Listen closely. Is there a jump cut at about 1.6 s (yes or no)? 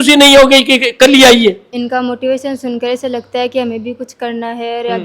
yes